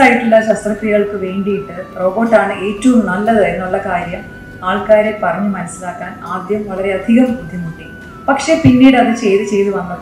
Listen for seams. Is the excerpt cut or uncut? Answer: cut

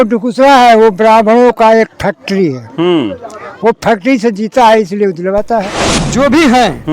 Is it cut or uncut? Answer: cut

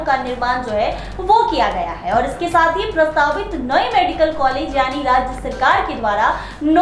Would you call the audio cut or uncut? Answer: uncut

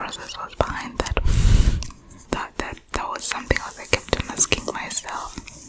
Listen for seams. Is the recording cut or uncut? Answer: cut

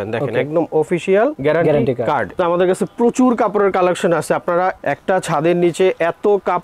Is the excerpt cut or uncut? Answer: cut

